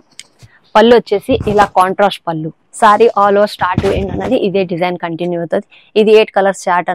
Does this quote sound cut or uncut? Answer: cut